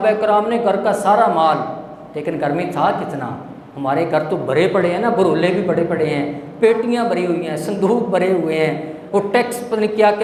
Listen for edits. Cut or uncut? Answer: uncut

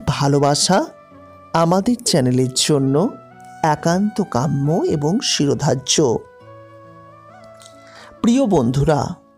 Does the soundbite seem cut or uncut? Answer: uncut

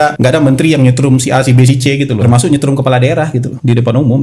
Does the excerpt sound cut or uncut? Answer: cut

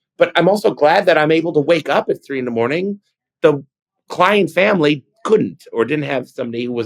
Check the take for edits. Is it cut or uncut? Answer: uncut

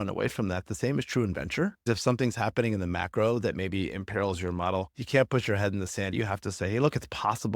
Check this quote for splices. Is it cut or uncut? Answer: cut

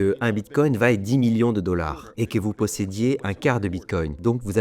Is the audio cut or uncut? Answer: cut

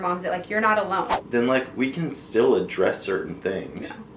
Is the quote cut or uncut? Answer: cut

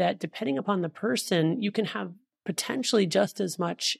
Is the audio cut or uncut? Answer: cut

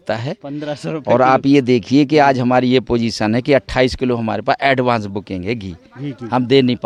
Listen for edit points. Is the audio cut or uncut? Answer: uncut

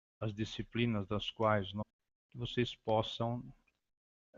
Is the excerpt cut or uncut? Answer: uncut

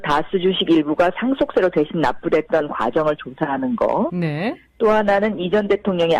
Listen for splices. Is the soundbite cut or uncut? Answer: uncut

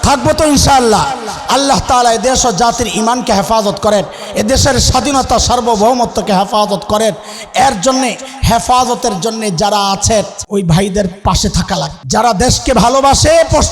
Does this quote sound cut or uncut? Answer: cut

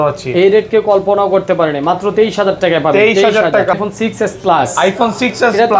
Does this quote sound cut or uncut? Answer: cut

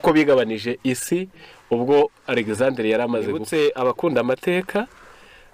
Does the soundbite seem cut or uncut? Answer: cut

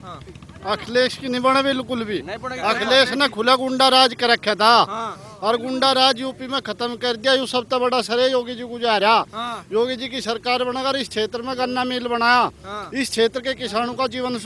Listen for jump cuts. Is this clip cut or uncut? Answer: uncut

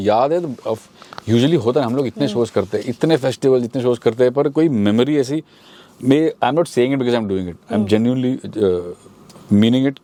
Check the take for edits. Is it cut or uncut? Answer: uncut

